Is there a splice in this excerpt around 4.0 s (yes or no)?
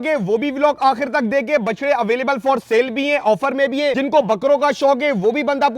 yes